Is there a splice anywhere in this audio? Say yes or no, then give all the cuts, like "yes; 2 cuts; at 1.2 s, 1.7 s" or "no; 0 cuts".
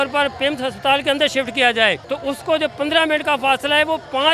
yes; 1 cut; at 2.1 s